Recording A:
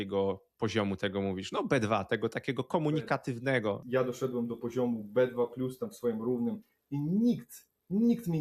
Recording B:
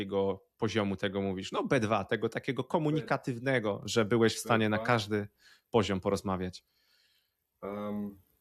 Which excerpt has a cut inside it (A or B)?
A